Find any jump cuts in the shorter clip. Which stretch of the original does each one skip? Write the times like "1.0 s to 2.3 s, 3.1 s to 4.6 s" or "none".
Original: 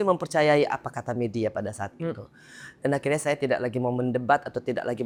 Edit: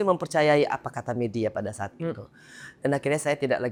none

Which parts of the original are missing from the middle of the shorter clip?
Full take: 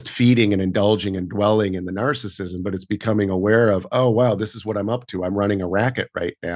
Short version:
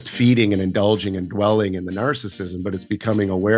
none

